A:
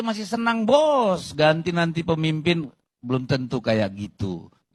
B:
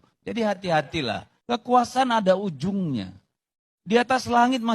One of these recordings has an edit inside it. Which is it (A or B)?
B